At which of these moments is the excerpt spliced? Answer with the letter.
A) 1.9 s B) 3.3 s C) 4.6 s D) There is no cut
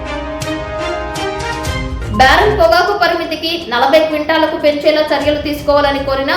A